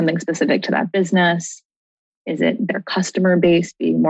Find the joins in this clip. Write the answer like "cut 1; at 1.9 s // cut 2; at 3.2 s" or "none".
none